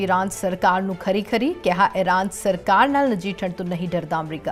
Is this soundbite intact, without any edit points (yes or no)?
yes